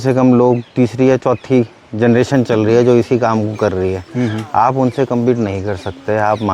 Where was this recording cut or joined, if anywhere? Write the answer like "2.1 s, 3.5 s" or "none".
none

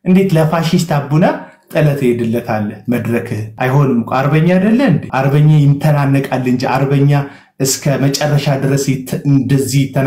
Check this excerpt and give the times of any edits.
3.4 s, 5.1 s

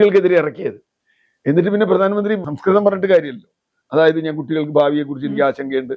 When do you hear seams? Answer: 2.4 s

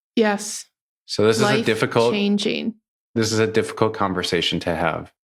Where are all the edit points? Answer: none

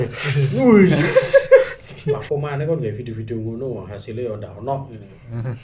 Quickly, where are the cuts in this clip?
2.2 s

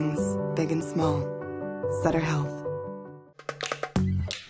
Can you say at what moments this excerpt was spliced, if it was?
3.2 s

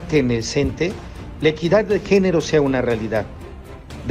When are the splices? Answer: none

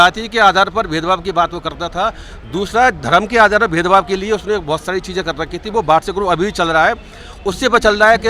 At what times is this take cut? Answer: none

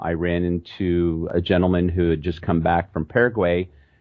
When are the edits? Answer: 1.3 s

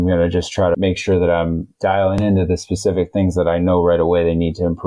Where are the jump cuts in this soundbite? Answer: 0.8 s, 2.2 s

